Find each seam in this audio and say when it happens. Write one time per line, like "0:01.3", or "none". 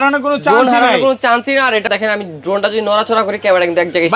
0:01.9